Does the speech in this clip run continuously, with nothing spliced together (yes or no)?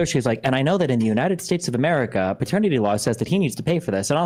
yes